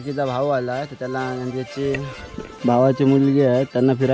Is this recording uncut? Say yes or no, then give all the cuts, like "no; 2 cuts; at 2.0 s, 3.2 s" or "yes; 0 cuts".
yes; 0 cuts